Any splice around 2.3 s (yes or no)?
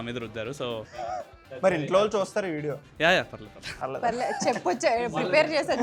no